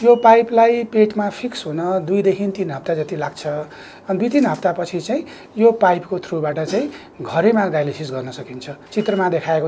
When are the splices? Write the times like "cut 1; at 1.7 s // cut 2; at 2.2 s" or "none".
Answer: cut 1; at 8.8 s